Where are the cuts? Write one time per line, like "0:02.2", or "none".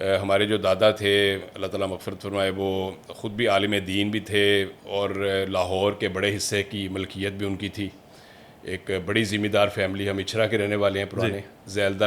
none